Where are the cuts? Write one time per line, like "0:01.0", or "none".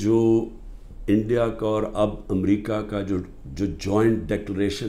none